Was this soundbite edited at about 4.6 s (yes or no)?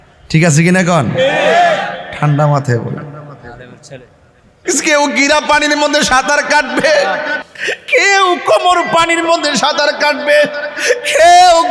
yes